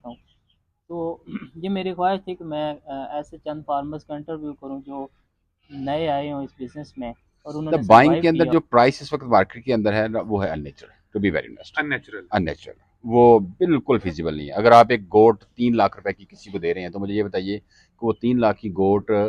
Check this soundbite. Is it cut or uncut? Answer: cut